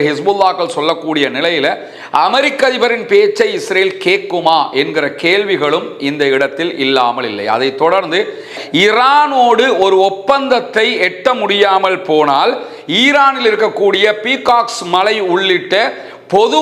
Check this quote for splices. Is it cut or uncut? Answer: cut